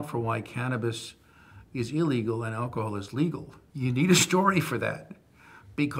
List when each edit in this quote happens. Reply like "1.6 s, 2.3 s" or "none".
3.6 s